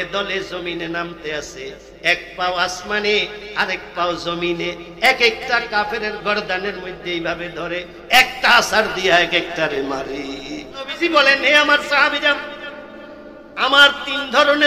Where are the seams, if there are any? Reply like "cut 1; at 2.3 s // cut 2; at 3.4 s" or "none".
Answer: cut 1; at 10.9 s